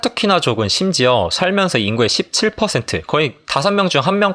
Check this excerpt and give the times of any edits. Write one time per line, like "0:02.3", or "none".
none